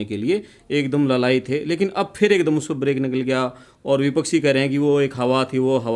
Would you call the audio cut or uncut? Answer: uncut